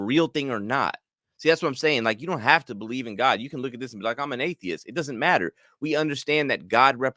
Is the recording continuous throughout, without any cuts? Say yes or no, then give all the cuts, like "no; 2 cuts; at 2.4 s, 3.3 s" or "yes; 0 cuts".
yes; 0 cuts